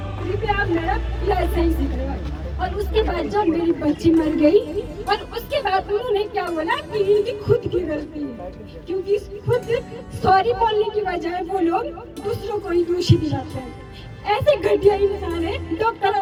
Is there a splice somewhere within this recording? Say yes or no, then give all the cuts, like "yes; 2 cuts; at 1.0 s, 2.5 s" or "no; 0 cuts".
no; 0 cuts